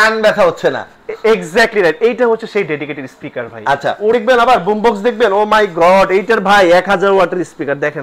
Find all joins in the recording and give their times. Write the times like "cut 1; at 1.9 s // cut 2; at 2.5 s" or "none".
cut 1; at 4.1 s